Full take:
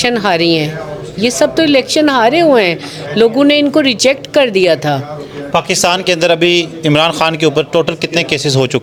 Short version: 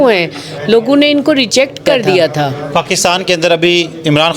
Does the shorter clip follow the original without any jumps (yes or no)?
no